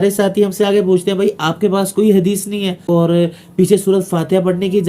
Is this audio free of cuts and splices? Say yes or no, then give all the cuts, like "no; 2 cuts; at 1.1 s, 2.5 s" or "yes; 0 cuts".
no; 1 cut; at 2.8 s